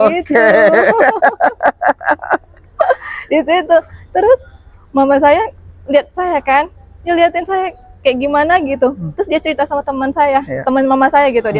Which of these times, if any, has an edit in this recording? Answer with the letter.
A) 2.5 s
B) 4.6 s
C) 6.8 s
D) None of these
D